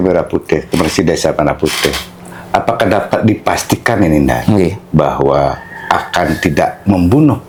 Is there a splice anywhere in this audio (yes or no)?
no